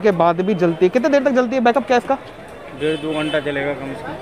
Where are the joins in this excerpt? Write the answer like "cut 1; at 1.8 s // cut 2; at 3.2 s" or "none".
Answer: none